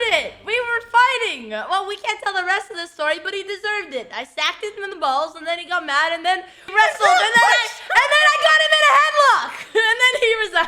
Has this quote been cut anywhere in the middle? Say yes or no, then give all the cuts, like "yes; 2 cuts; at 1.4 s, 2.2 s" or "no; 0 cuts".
yes; 1 cut; at 6.6 s